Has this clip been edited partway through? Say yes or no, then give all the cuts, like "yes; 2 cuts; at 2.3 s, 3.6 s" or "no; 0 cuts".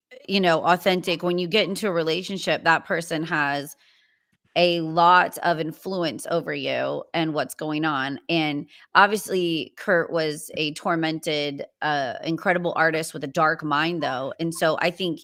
no; 0 cuts